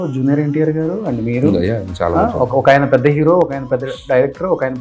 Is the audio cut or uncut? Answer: uncut